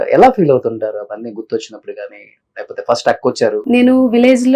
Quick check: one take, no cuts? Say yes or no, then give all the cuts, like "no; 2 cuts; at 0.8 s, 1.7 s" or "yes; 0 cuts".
no; 1 cut; at 3.6 s